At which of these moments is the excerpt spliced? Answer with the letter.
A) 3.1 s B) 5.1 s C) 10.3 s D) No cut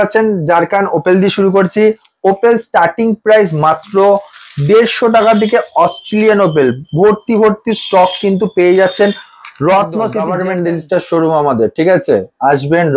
C